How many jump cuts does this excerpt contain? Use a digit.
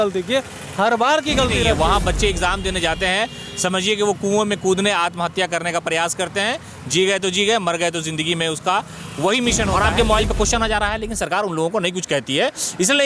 2